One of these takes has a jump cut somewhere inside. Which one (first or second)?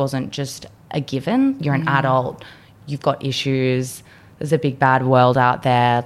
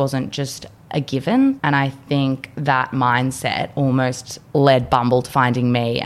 second